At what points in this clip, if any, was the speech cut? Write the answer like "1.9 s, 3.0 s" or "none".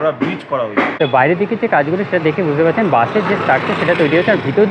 0.9 s